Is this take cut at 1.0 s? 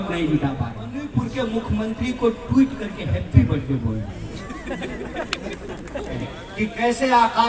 yes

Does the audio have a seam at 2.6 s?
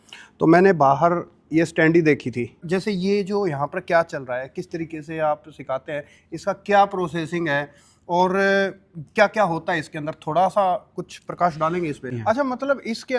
yes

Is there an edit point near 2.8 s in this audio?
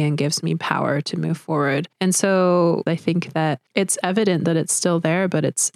yes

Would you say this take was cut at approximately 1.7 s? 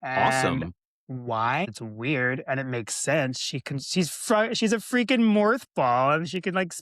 yes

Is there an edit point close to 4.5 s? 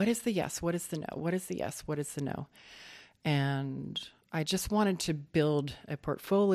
yes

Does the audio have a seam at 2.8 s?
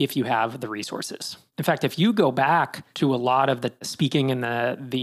yes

